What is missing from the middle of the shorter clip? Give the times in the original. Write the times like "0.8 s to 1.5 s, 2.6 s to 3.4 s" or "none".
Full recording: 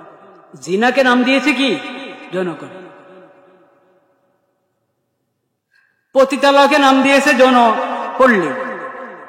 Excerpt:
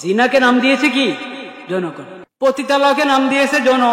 2.8 s to 5.9 s